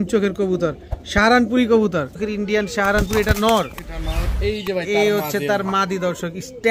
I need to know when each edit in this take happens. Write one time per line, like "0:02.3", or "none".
0:02.2